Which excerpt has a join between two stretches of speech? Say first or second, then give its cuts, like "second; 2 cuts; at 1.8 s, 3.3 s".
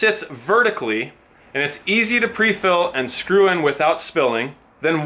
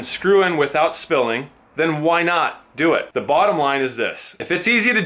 second; 1 cut; at 3.1 s